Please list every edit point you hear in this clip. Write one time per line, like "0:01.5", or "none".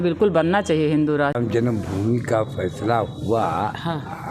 0:01.3